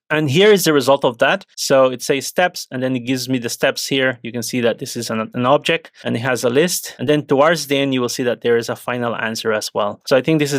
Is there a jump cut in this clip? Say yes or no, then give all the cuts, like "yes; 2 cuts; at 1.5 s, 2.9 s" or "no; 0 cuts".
yes; 1 cut; at 6.9 s